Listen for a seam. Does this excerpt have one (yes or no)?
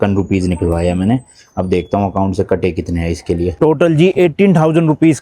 no